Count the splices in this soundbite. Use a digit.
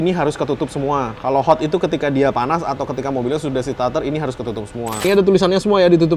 1